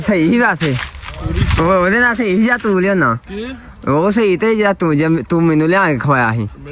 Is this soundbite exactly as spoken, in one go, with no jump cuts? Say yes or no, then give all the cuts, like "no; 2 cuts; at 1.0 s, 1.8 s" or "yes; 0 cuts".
yes; 0 cuts